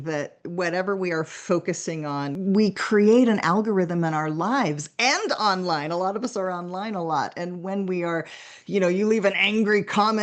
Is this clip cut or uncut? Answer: cut